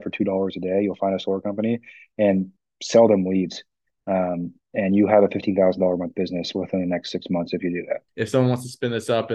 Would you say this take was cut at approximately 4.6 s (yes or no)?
no